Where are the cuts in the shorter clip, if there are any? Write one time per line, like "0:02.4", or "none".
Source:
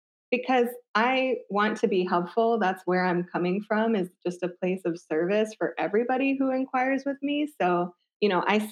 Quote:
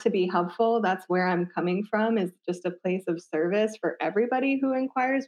none